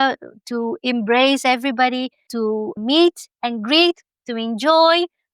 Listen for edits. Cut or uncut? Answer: cut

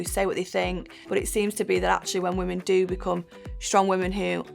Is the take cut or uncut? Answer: cut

